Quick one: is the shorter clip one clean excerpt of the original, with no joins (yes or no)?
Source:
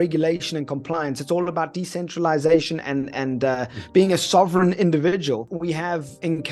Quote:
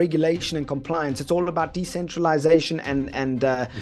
yes